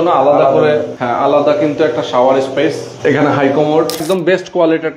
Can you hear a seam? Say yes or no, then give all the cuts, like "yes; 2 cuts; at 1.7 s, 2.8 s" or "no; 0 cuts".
yes; 3 cuts; at 0.9 s, 2.9 s, 4.0 s